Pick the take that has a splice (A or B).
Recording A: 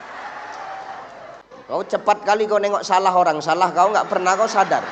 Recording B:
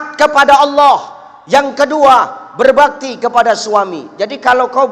A